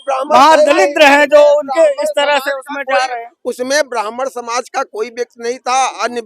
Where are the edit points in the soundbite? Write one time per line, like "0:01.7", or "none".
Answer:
none